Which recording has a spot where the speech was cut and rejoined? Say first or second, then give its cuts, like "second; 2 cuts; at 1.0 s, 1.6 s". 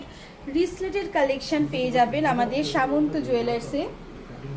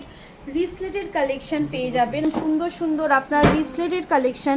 second; 1 cut; at 2.2 s